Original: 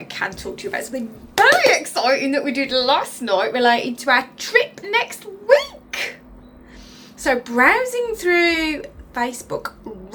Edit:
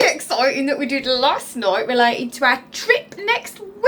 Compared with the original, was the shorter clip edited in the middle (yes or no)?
no